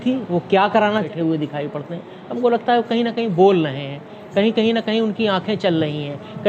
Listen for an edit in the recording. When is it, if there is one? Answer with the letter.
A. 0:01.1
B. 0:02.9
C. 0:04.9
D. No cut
A